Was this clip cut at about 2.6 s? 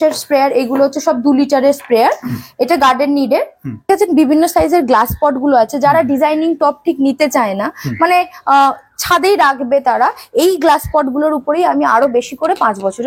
no; 1 cut; at 3.9 s

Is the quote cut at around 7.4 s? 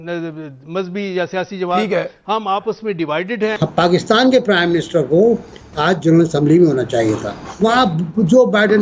yes; 2 cuts; at 3.7 s, 7.4 s

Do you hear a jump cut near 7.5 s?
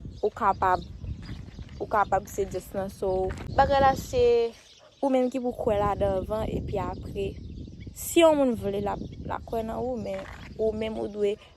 no; 1 cut; at 3.5 s

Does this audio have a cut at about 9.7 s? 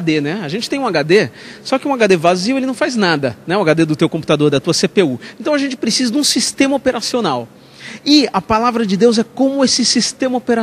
no; 0 cuts

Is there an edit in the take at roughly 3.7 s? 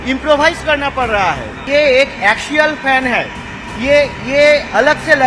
no; 1 cut; at 1.6 s

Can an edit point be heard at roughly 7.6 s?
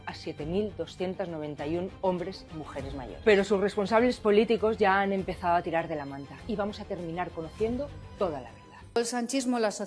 no; 1 cut; at 8.9 s

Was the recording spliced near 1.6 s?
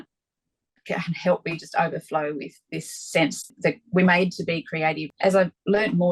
no; 2 cuts; at 3.5 s, 5.1 s

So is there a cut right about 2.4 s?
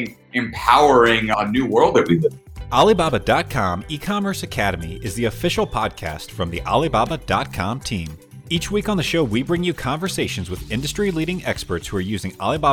yes; 1 cut; at 2.4 s

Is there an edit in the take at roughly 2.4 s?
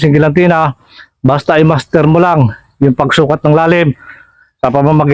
no; 0 cuts

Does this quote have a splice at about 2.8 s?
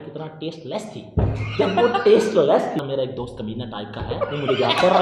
yes; 1 cut; at 2.8 s

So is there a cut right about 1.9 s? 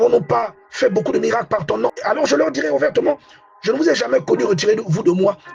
yes; 1 cut; at 1.9 s

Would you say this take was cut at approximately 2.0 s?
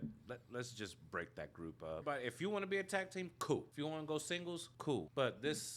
yes; 3 cuts; at 2.0 s, 3.7 s, 4.9 s

